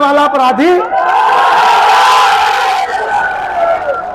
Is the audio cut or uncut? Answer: uncut